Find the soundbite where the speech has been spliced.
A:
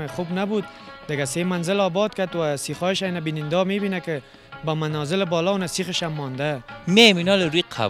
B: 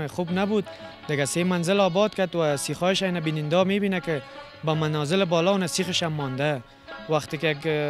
A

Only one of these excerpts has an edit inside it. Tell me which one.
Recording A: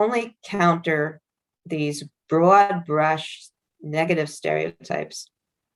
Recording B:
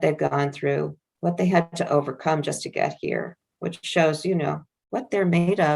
B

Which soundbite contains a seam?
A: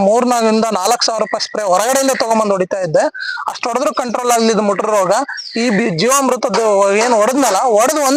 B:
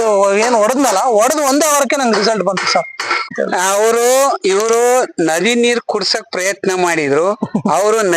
B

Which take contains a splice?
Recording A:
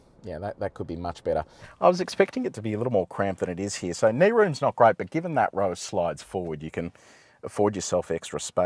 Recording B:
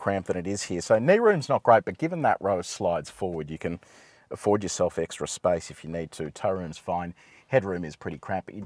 A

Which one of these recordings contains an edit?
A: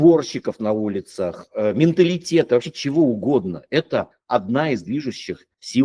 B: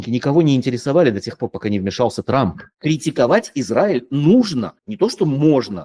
B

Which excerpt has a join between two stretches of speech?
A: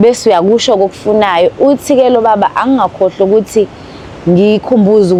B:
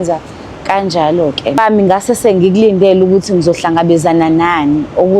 B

